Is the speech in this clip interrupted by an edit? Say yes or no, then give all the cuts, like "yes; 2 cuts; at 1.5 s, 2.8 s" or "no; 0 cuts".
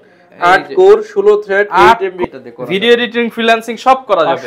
yes; 1 cut; at 2.2 s